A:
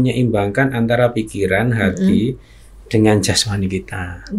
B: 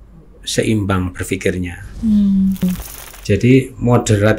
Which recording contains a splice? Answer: B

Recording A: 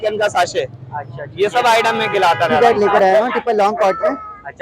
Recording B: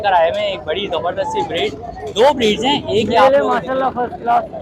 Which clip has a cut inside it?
A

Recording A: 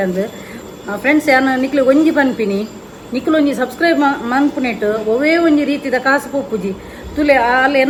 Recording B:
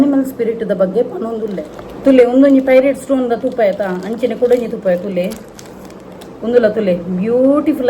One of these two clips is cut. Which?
B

